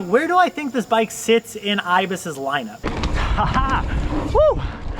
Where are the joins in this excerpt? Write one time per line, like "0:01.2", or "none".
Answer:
0:02.8